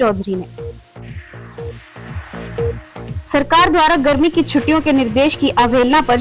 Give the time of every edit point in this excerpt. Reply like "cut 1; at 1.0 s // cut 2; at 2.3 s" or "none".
cut 1; at 3.2 s